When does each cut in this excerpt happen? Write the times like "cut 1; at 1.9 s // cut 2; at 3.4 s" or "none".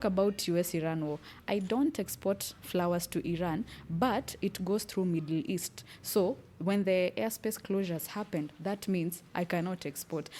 none